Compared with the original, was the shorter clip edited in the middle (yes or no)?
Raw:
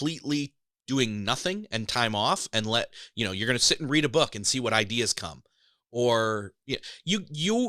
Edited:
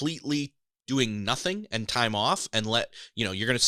no